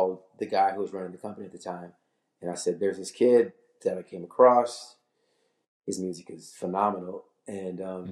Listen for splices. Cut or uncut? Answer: uncut